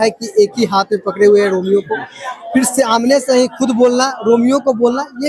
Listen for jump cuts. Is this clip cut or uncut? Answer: uncut